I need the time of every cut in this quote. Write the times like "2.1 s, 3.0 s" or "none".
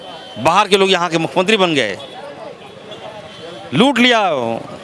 none